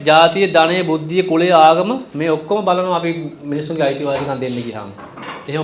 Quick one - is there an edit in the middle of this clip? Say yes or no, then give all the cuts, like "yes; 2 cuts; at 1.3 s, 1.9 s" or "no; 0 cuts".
no; 0 cuts